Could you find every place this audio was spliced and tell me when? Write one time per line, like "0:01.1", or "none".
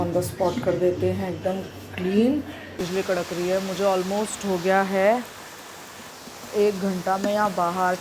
0:02.8